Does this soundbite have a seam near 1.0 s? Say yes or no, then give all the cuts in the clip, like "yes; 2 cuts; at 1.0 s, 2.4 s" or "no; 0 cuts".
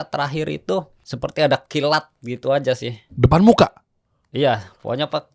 yes; 1 cut; at 1.0 s